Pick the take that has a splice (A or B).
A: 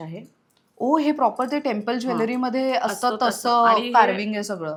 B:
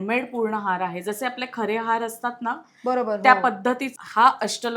B